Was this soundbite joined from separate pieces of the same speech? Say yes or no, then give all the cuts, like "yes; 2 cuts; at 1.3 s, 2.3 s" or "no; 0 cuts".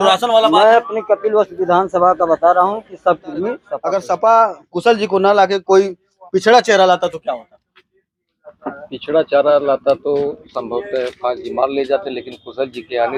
no; 0 cuts